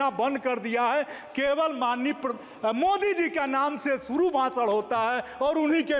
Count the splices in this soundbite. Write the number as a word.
zero